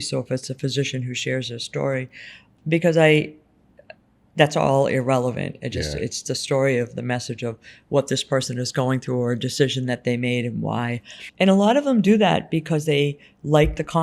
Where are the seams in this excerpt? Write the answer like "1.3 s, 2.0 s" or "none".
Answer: 2.4 s, 11.2 s

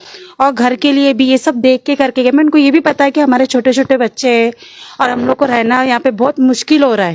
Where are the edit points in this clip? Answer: none

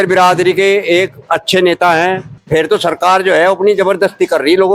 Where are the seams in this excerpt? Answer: 2.3 s

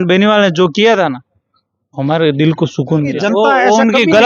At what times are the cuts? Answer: 3.1 s

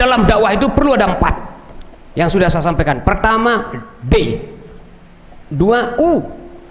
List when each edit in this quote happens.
none

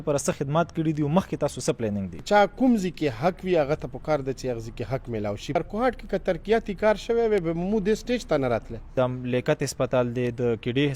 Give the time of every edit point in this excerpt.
2.2 s, 5.6 s, 8.9 s

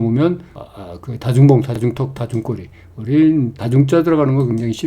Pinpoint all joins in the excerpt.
3.6 s

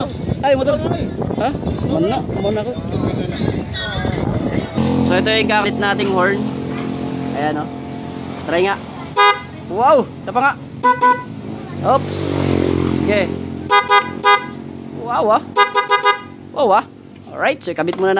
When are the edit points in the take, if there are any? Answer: 4.7 s, 5.6 s

